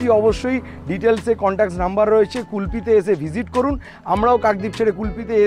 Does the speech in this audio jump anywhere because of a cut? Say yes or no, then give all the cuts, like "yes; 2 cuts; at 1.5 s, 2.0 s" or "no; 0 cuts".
no; 0 cuts